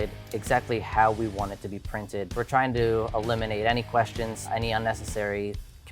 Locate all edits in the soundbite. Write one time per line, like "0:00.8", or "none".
0:02.3
0:04.4